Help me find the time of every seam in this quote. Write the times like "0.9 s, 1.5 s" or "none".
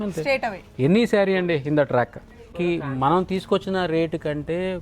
2.5 s